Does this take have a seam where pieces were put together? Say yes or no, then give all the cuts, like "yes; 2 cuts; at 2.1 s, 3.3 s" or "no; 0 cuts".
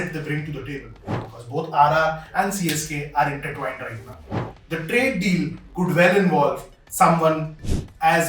yes; 2 cuts; at 1.2 s, 4.4 s